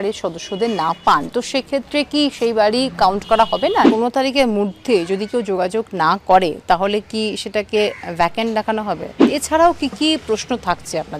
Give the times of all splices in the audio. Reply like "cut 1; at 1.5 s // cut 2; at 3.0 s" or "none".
cut 1; at 3.9 s // cut 2; at 9.2 s